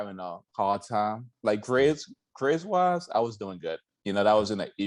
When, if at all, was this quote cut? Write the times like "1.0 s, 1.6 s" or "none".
none